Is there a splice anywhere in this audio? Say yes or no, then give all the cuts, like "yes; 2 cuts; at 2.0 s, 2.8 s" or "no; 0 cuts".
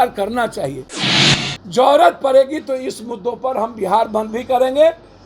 yes; 1 cut; at 1.2 s